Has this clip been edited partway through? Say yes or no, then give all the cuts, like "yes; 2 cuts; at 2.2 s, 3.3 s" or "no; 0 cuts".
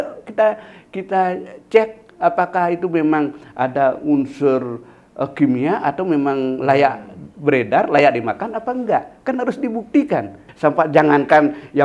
yes; 1 cut; at 10.4 s